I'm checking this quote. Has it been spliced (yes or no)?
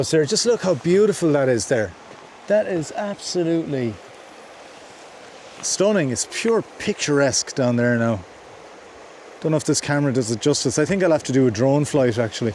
no